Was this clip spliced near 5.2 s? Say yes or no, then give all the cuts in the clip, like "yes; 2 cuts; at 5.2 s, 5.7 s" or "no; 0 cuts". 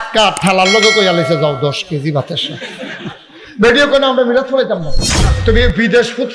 yes; 1 cut; at 5.2 s